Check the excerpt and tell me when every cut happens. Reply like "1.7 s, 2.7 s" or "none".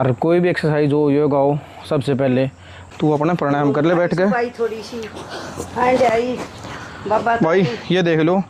2.8 s

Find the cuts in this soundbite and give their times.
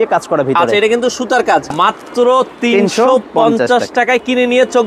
1.7 s

